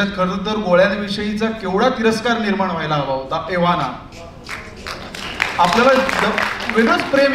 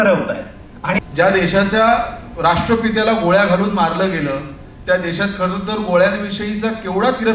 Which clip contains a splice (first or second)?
second